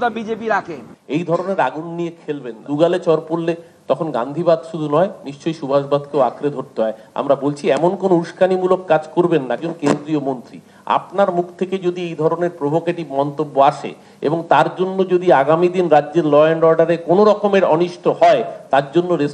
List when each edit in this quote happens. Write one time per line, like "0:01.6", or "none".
0:00.9

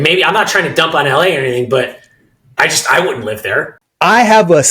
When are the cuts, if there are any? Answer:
0:03.8

